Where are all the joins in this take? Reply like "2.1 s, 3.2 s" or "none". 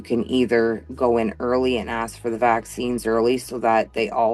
3.0 s